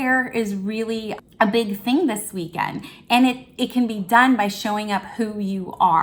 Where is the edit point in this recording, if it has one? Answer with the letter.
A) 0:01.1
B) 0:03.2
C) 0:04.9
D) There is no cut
A